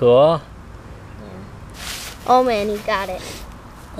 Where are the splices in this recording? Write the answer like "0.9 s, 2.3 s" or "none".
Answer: 1.7 s